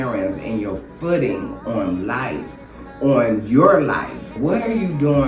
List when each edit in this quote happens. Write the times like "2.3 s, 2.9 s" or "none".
4.4 s